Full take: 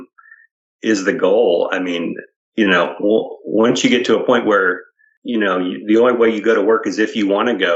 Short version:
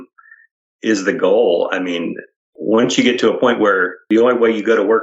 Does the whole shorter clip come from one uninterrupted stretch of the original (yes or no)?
no